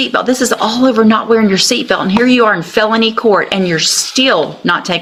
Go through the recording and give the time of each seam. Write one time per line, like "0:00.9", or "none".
none